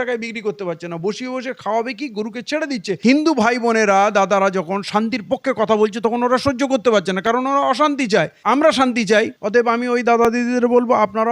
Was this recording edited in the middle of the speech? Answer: yes; 1 cut; at 2.9 s

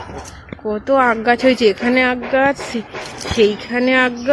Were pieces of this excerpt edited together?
no; 0 cuts

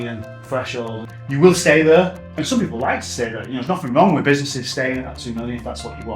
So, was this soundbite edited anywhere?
yes; 2 cuts; at 1.1 s, 2.2 s

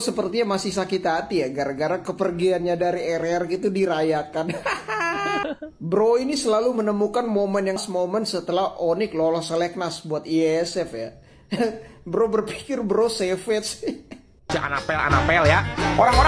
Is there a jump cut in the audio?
yes; 2 cuts; at 7.8 s, 14.5 s

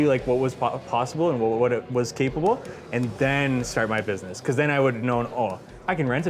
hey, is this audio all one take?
yes; 0 cuts

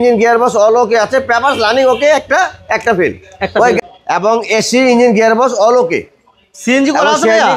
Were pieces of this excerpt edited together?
yes; 1 cut; at 3.8 s

